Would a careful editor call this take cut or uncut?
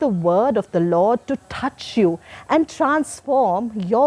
uncut